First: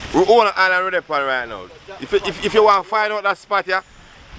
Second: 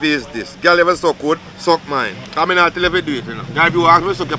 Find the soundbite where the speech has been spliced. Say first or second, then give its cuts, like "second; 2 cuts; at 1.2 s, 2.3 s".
second; 3 cuts; at 1.5 s, 2.2 s, 3.4 s